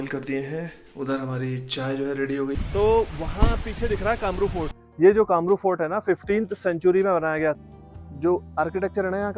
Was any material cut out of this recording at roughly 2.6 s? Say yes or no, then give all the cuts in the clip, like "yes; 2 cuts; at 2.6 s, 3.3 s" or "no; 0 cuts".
yes; 3 cuts; at 2.6 s, 4.8 s, 7.6 s